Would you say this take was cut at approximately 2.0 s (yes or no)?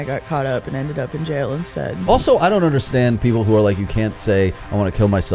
yes